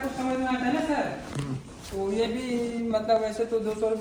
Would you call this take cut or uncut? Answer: uncut